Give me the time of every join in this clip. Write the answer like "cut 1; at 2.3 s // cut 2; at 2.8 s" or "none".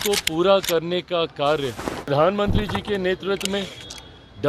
cut 1; at 2.1 s